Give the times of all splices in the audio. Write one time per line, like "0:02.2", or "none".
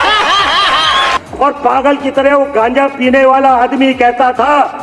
0:01.1